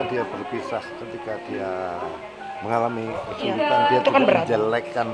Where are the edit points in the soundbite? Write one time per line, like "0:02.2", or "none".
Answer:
none